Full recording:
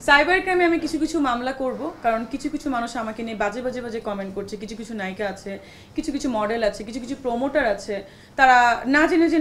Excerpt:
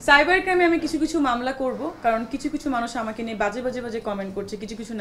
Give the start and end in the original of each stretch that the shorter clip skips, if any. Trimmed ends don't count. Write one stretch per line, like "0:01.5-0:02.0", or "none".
none